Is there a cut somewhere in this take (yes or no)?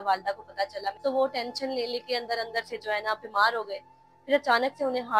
yes